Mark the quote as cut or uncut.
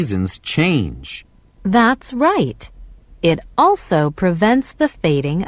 uncut